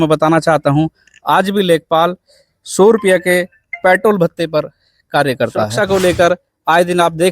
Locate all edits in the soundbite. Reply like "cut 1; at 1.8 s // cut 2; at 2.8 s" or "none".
cut 1; at 5.7 s

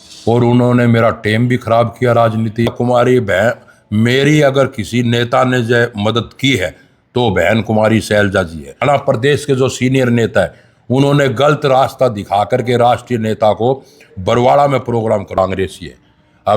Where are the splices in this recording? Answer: cut 1; at 2.7 s // cut 2; at 8.8 s // cut 3; at 15.4 s

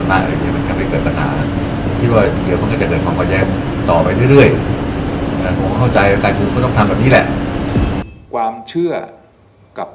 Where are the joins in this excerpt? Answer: cut 1; at 8.0 s

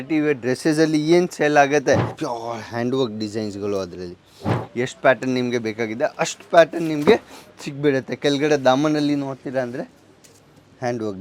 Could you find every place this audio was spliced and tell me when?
cut 1; at 2.1 s // cut 2; at 4.6 s

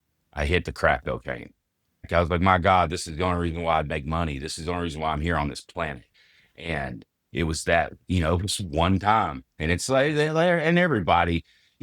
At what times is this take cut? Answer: cut 1; at 2.1 s

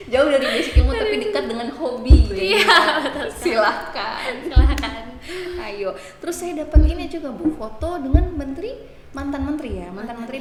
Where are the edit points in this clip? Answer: none

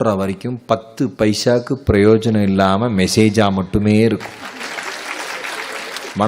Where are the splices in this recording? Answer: cut 1; at 4.4 s

